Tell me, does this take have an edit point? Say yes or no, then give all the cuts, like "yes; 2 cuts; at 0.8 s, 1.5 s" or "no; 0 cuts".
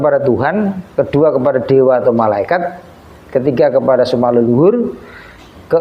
no; 0 cuts